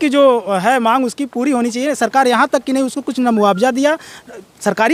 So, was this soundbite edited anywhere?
no; 0 cuts

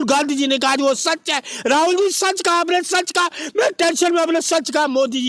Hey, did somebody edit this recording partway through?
no; 0 cuts

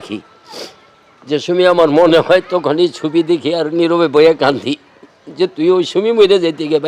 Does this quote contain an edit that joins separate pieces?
no; 0 cuts

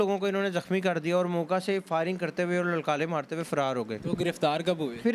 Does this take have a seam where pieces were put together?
no; 0 cuts

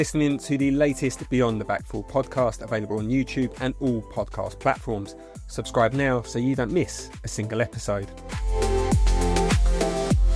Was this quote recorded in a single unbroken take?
yes; 0 cuts

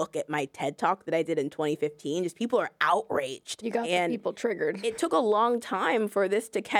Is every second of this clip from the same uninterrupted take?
no; 2 cuts; at 3.6 s, 5.1 s

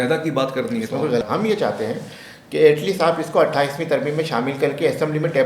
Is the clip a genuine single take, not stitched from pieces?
no; 1 cut; at 1.2 s

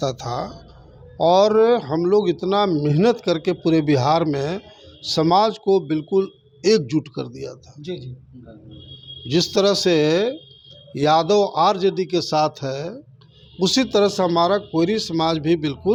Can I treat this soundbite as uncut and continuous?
yes; 0 cuts

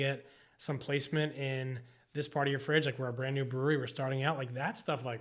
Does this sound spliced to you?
no; 0 cuts

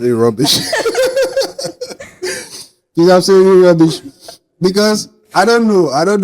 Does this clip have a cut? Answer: no; 0 cuts

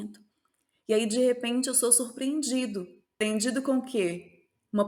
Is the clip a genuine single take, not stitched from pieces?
no; 1 cut; at 3.2 s

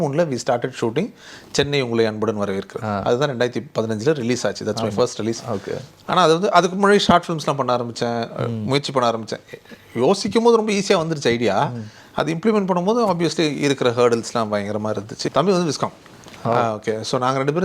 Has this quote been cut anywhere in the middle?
yes; 1 cut; at 15.2 s

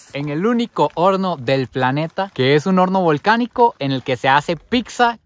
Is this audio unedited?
yes; 0 cuts

